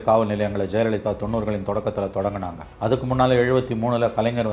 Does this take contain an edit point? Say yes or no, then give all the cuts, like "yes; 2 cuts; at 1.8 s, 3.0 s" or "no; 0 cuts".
yes; 1 cut; at 2.6 s